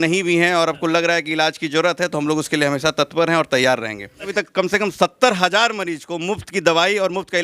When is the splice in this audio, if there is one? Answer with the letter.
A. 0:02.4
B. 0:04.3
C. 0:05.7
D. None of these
B